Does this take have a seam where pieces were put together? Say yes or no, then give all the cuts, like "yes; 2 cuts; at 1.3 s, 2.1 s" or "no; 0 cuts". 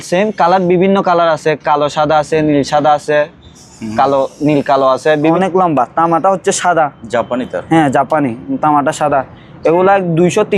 yes; 1 cut; at 5.3 s